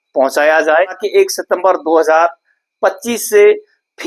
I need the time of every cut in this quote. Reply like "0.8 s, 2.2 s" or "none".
1.0 s